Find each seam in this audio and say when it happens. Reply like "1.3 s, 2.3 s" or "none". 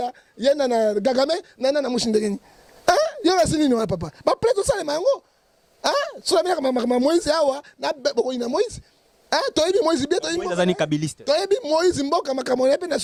none